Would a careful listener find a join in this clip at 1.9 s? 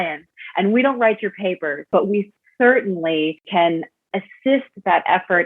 yes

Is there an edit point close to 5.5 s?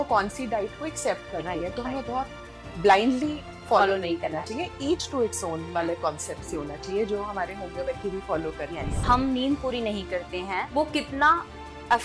no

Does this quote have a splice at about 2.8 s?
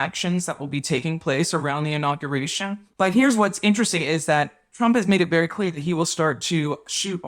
yes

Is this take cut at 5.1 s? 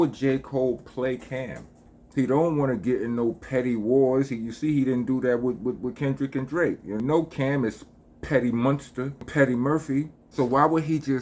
no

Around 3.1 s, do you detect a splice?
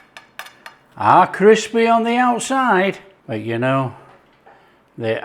yes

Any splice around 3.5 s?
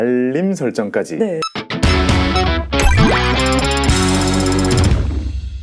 no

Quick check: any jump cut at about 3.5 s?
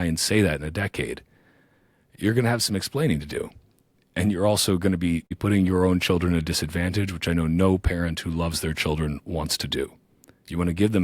no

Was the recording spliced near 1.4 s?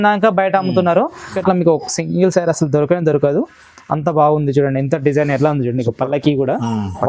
yes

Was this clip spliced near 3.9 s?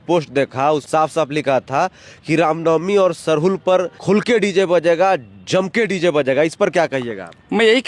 yes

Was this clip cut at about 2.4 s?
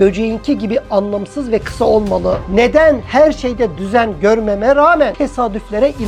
yes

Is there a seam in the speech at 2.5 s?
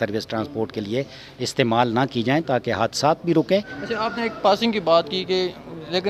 no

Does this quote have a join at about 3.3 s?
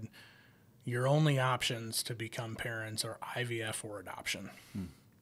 no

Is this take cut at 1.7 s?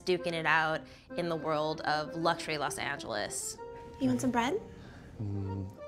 yes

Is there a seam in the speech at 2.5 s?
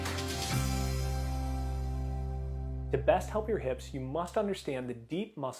yes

